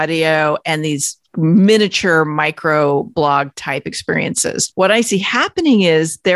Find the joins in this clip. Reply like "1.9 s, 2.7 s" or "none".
4.6 s